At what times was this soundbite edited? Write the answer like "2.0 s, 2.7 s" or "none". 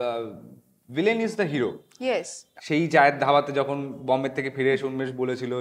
2.4 s